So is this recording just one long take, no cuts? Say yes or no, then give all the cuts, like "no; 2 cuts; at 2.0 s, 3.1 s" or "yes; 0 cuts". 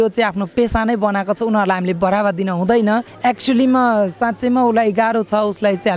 no; 1 cut; at 3.1 s